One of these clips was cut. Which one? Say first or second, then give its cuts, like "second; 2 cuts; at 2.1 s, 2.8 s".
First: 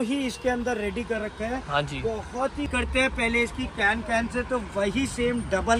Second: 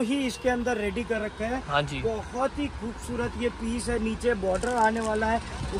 first; 1 cut; at 2.7 s